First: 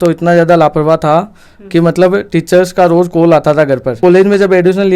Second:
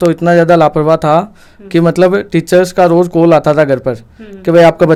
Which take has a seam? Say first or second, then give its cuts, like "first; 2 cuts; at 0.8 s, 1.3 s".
first; 1 cut; at 4.0 s